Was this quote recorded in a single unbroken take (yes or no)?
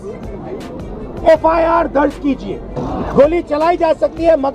no